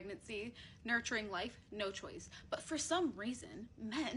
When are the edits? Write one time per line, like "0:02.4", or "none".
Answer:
0:02.3